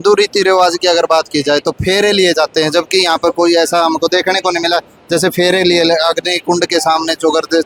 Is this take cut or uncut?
uncut